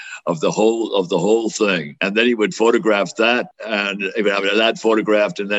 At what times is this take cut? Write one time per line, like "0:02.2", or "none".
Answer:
0:01.9
0:03.6